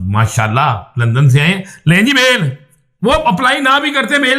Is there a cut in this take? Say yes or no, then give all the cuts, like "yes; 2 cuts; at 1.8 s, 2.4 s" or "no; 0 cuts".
no; 0 cuts